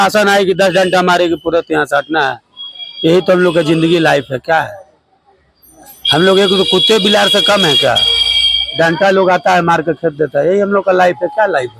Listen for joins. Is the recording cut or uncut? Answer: uncut